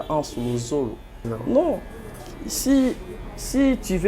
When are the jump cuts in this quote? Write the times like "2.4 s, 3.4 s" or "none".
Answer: 1.3 s